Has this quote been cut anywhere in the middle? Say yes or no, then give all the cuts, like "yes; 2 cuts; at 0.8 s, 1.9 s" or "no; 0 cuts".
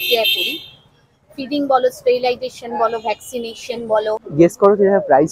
yes; 1 cut; at 4.2 s